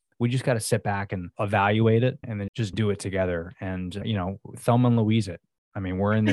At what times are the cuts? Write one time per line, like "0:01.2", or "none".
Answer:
0:01.3
0:02.4